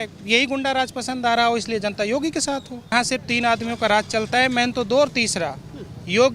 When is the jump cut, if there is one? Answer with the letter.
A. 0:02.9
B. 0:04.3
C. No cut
A